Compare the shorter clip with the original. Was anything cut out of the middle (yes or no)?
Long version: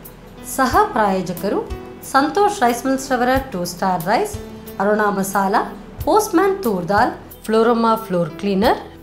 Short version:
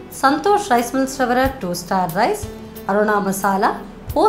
no